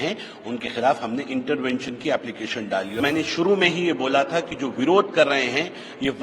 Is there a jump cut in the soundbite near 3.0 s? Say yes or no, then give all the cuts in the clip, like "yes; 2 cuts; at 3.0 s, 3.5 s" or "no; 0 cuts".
yes; 1 cut; at 3.0 s